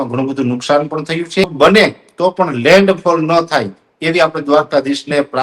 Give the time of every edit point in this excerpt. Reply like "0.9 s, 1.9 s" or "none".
1.5 s